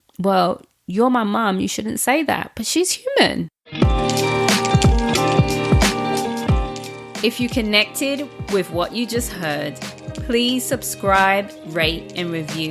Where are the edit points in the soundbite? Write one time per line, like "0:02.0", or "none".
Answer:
0:03.6